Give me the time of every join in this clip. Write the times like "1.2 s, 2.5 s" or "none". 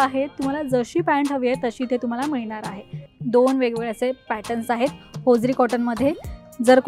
3.1 s